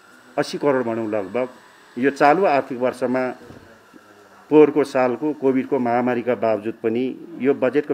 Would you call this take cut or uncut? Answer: uncut